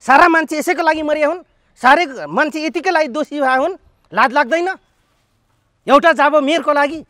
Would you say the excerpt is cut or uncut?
uncut